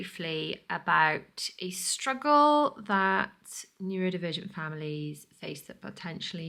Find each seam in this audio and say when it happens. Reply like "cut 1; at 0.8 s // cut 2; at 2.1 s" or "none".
none